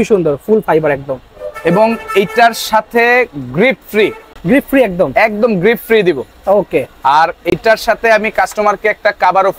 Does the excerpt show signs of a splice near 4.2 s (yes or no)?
no